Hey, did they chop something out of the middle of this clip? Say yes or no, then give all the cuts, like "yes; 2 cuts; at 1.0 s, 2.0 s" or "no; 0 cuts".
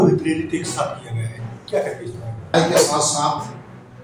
yes; 1 cut; at 2.5 s